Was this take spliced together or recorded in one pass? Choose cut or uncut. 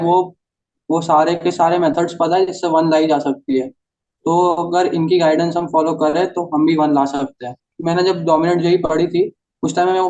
cut